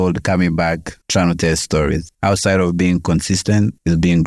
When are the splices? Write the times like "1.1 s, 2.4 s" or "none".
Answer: 2.1 s